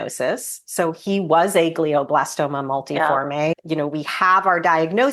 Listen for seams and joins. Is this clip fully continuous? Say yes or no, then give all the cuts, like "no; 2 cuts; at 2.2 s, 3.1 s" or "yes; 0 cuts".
no; 1 cut; at 3.6 s